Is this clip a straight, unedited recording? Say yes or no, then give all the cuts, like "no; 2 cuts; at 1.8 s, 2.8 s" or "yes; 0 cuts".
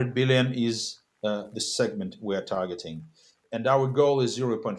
no; 1 cut; at 3.4 s